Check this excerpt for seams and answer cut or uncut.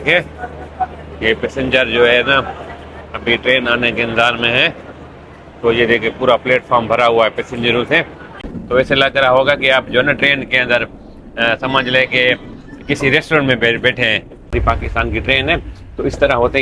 cut